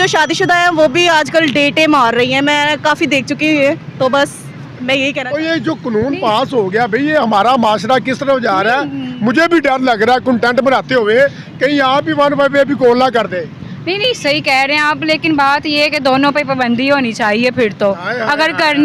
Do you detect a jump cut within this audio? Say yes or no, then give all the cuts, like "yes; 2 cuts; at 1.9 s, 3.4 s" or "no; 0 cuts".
yes; 1 cut; at 5.2 s